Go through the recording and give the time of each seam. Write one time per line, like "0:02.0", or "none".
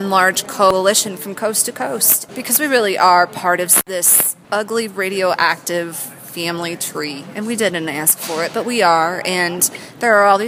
0:00.7
0:02.2
0:03.9